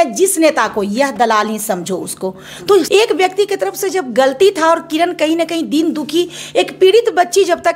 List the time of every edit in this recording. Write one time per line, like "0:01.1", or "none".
0:02.9